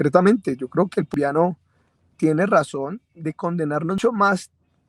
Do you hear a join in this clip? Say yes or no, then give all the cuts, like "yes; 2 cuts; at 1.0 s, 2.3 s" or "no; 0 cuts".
yes; 2 cuts; at 1.1 s, 4.0 s